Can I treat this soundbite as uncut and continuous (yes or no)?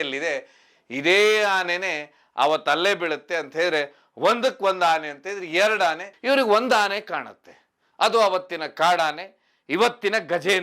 no